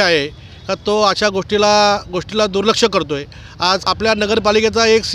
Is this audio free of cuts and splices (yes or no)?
no